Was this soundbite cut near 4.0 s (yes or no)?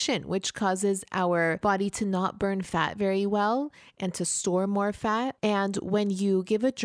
no